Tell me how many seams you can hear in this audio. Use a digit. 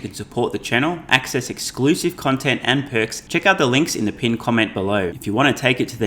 2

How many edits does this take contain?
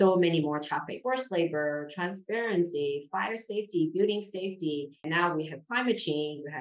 2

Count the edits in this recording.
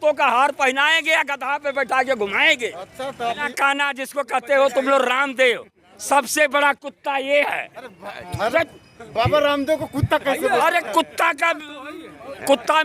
1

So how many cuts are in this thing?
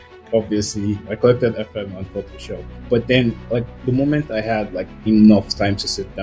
1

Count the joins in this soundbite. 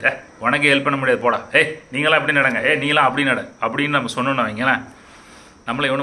0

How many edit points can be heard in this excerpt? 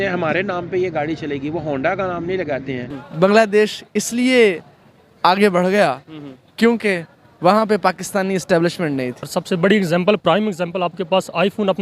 2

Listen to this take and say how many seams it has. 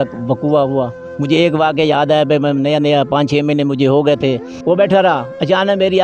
2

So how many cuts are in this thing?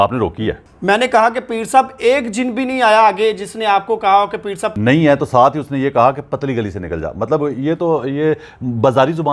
1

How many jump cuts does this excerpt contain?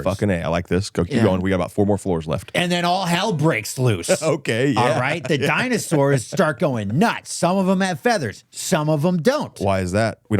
1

